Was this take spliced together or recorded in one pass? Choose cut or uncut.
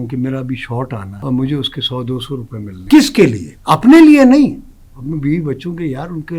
cut